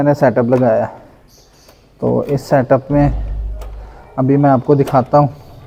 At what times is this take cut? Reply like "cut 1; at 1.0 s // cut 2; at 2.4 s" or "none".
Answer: none